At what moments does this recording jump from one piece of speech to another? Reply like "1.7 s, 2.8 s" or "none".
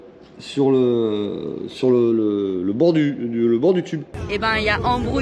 4.2 s